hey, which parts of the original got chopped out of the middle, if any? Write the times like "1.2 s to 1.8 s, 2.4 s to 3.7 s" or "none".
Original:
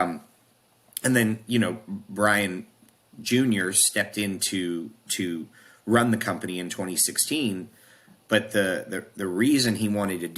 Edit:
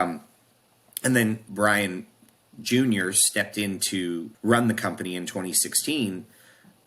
1.4 s to 2.0 s, 4.9 s to 5.7 s

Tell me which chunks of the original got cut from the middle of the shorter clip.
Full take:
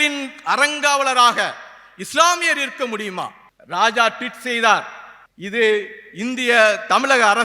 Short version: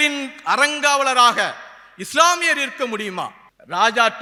none

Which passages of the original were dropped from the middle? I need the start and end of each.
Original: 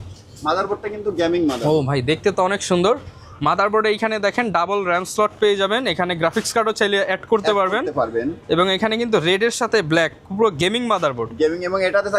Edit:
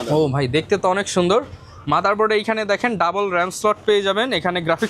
none

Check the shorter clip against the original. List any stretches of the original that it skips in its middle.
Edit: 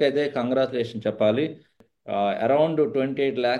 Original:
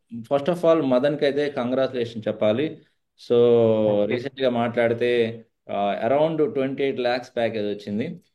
3.1 s to 5.5 s

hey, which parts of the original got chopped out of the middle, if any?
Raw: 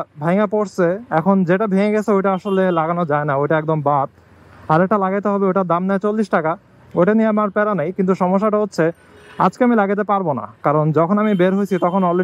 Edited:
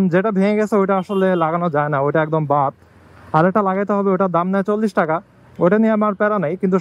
none

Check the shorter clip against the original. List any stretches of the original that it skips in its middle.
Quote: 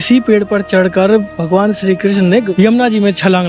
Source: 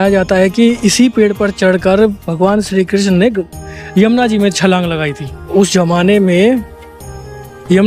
3.4 s to 3.9 s

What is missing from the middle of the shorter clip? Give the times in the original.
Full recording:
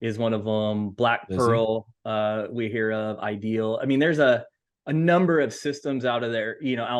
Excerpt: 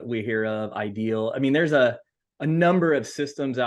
none

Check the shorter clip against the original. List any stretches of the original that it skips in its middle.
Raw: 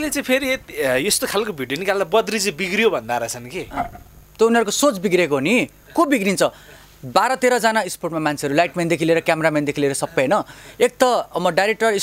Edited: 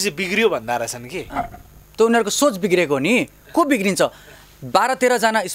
none

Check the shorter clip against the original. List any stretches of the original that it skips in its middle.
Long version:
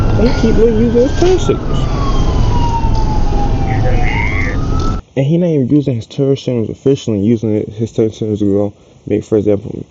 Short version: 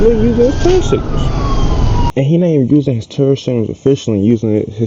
2.7 s to 5.1 s

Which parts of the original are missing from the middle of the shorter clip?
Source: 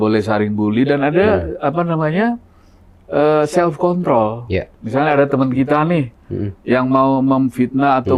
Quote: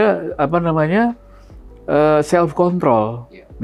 none

